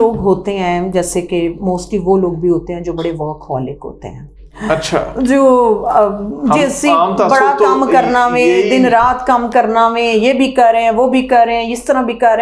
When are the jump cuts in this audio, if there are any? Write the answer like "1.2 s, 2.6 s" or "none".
none

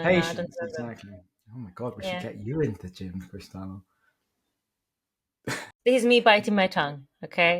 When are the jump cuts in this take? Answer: none

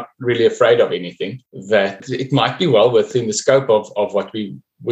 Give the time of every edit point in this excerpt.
1.8 s, 3.1 s

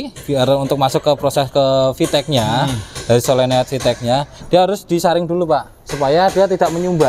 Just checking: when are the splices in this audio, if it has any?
none

